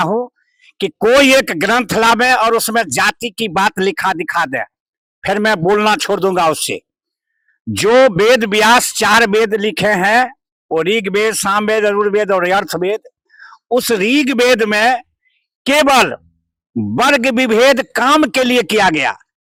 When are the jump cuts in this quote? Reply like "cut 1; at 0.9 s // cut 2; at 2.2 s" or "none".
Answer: none